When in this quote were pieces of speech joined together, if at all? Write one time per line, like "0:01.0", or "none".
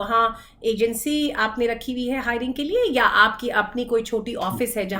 none